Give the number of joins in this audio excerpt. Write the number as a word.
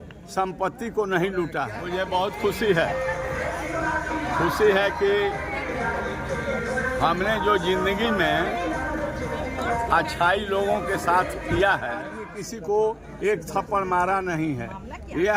two